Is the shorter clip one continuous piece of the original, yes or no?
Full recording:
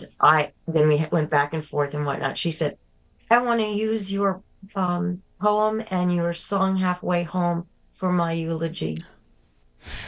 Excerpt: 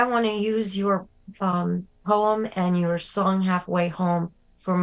yes